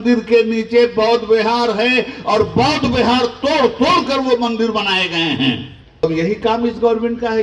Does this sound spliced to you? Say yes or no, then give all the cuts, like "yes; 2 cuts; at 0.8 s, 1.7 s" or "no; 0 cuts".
yes; 1 cut; at 6.0 s